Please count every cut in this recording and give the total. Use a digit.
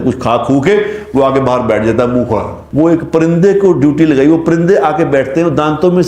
1